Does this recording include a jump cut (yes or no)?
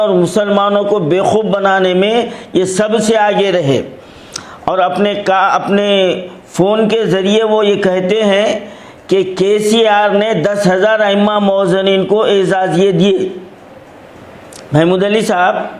no